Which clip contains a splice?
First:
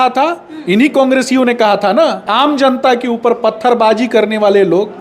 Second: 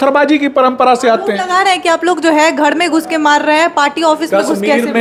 first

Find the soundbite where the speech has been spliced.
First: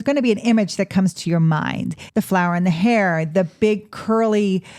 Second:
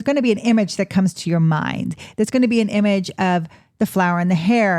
first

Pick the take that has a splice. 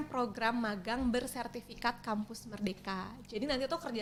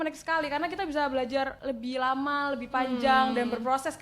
second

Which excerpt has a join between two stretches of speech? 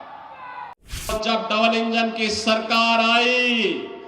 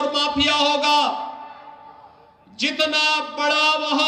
first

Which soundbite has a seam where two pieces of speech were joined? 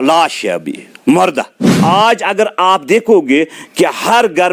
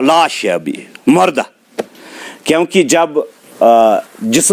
first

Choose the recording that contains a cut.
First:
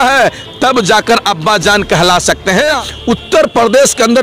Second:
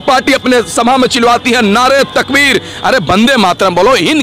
first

